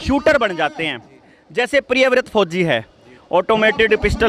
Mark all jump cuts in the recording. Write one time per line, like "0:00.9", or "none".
none